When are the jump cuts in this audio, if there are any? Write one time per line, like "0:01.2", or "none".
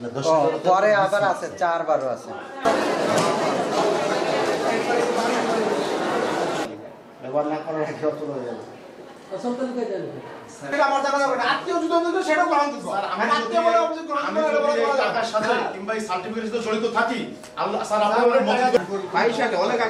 none